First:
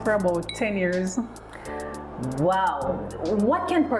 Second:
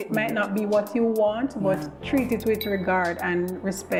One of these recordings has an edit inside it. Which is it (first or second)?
first